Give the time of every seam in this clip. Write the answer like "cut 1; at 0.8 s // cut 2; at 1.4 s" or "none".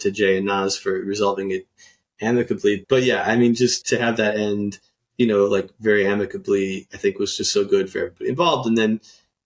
cut 1; at 2.8 s